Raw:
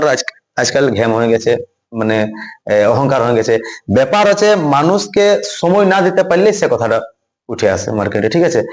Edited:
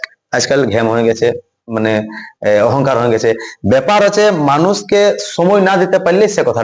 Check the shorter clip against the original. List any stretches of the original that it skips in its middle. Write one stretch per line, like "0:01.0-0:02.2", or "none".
none